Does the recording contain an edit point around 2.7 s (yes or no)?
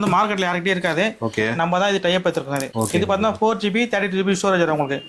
no